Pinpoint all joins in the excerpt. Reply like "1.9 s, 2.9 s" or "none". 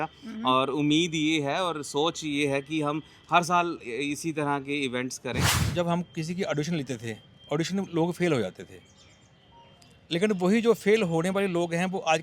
5.6 s